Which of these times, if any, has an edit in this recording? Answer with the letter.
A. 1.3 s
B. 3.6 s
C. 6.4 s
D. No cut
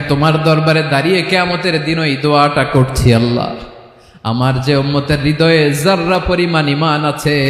D